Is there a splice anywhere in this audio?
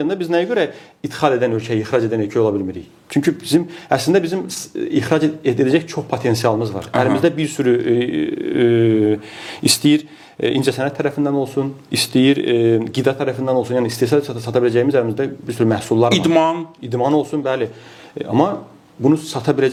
no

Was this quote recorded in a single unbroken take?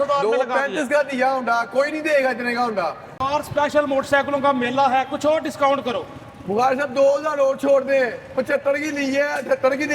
no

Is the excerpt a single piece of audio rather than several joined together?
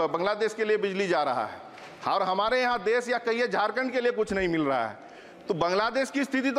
yes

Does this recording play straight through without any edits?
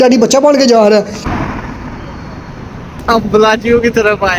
no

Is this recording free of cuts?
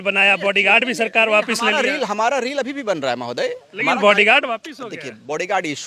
yes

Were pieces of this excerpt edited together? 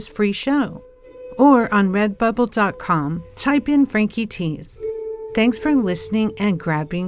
no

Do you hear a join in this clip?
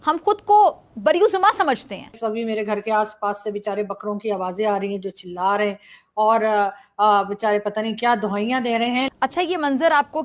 yes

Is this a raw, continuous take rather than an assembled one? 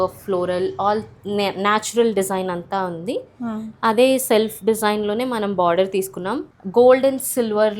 no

